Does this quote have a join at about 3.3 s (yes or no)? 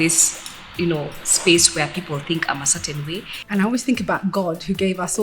yes